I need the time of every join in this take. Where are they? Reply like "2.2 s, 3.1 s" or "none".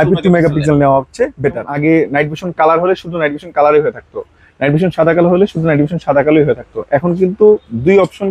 1.7 s